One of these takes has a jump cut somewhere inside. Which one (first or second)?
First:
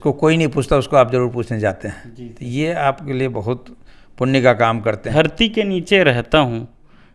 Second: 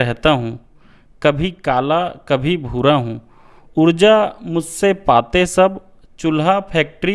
first